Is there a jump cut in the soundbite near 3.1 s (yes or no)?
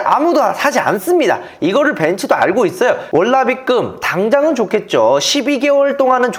yes